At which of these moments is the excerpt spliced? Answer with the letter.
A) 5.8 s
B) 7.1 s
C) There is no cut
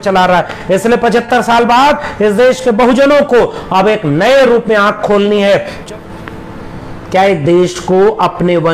A